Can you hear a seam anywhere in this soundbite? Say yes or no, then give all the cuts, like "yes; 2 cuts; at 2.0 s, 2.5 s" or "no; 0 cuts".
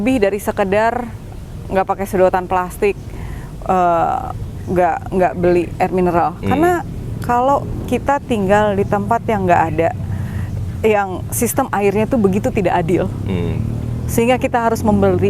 no; 0 cuts